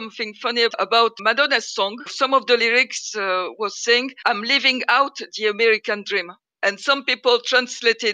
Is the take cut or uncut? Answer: cut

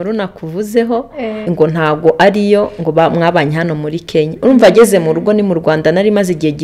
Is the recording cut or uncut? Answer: cut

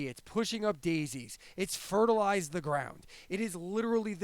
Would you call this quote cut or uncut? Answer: uncut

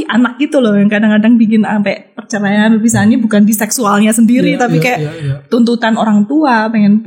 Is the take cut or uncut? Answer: uncut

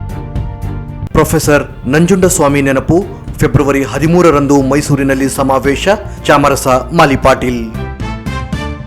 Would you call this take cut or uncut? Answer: uncut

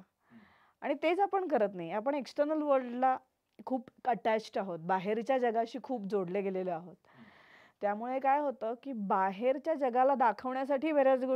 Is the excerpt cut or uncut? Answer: uncut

